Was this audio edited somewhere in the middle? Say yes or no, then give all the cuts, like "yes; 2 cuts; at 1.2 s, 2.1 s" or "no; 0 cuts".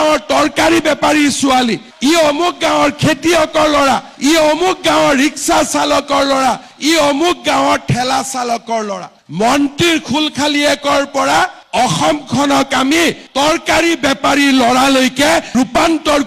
no; 0 cuts